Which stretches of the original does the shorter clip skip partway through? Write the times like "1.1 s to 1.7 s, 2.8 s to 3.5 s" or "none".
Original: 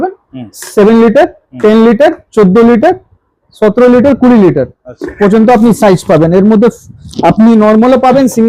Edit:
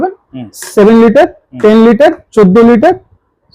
none